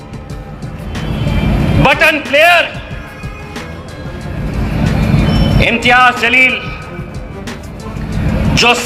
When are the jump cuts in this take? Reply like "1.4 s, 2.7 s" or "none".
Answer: none